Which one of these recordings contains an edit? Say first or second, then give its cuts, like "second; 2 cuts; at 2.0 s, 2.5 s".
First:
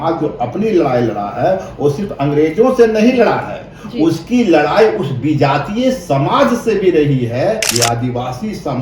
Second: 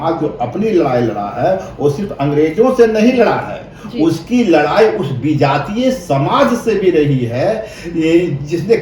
first; 1 cut; at 7.7 s